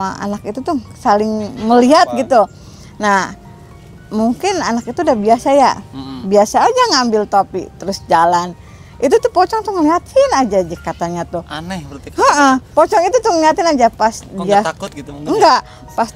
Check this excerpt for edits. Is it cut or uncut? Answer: uncut